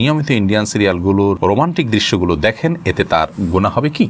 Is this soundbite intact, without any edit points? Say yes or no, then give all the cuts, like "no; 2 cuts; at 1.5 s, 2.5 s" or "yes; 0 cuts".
no; 1 cut; at 1.4 s